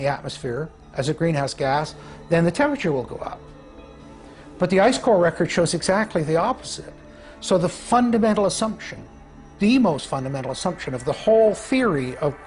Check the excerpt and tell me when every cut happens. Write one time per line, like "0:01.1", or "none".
none